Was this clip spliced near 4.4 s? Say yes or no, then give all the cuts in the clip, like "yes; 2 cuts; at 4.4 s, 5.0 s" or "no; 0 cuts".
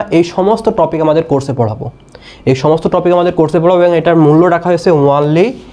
no; 0 cuts